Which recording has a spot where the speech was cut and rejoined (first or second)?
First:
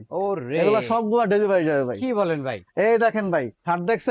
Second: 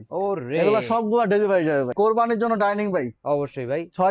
second